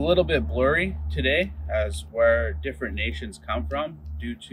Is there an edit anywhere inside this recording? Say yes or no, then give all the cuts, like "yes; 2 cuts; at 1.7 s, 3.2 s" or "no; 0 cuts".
no; 0 cuts